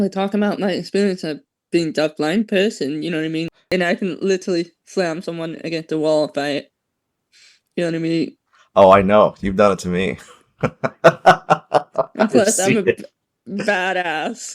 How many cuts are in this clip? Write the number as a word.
one